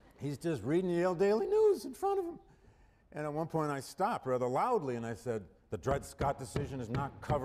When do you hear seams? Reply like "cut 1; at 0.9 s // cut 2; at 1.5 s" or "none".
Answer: cut 1; at 3.9 s